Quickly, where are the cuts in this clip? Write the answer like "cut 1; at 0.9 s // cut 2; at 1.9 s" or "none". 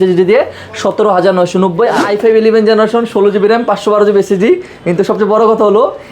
cut 1; at 2.0 s